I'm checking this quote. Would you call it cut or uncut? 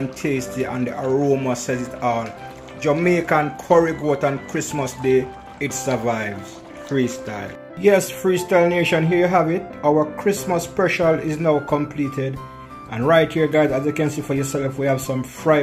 cut